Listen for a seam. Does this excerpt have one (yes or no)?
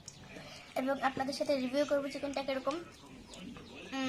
no